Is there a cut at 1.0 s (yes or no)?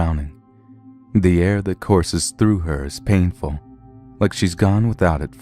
no